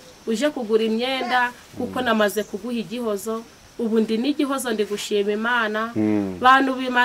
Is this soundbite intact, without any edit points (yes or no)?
yes